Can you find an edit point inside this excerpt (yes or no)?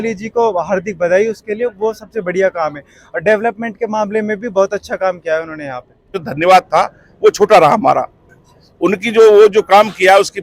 yes